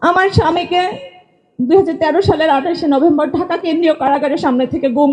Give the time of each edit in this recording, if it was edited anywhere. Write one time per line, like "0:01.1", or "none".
none